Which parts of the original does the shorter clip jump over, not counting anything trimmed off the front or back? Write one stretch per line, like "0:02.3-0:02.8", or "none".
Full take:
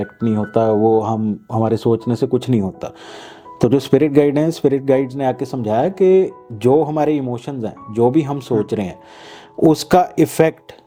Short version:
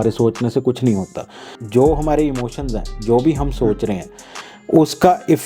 0:03.2-0:06.4